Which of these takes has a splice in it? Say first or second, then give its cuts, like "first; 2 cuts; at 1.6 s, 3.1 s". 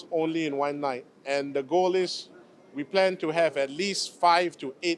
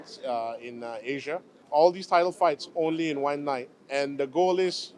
second; 1 cut; at 1.5 s